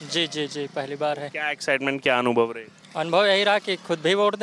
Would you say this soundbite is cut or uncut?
uncut